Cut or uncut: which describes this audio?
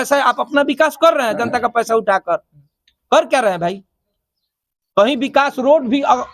uncut